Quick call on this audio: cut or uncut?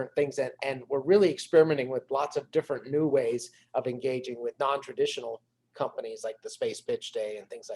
uncut